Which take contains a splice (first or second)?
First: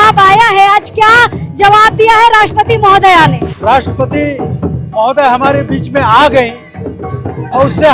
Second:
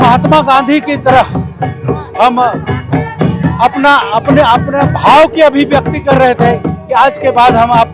first